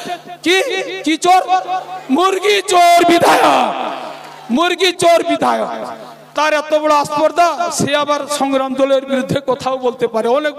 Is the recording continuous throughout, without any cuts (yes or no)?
yes